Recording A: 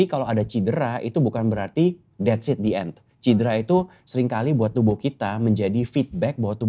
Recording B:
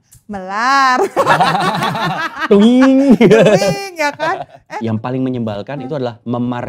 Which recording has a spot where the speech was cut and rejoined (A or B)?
B